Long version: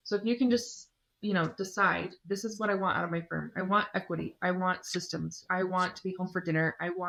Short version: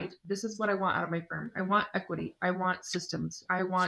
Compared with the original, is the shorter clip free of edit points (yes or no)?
yes